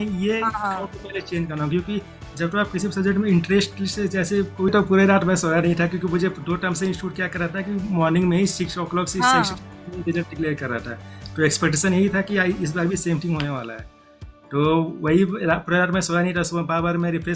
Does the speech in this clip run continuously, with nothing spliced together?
no; 1 cut; at 4.7 s

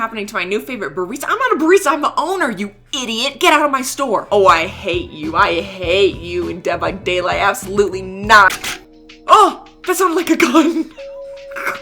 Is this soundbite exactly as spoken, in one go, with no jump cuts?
no; 2 cuts; at 4.2 s, 8.6 s

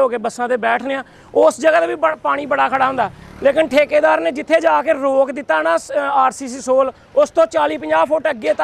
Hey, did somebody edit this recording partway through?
no; 0 cuts

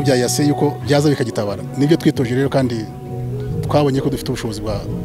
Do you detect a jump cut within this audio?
no; 0 cuts

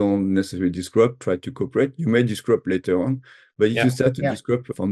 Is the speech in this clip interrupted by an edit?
no; 0 cuts

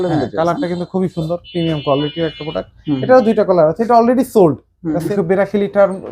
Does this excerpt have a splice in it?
yes; 1 cut; at 5.1 s

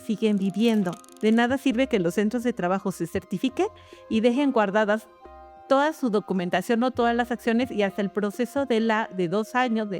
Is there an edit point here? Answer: yes; 1 cut; at 1.0 s

